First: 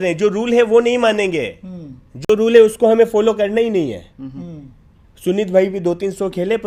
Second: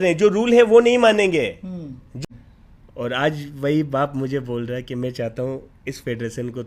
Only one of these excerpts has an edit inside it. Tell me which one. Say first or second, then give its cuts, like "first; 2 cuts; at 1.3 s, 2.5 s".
second; 1 cut; at 2.2 s